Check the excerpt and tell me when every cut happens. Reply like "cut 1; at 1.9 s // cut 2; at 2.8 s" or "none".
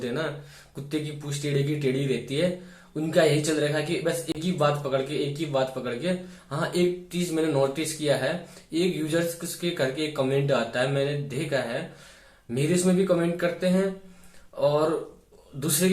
none